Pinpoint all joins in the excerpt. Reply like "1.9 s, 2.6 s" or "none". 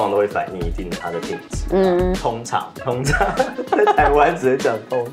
none